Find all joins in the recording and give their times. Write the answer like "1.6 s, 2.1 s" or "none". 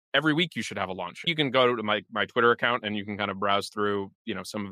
1.3 s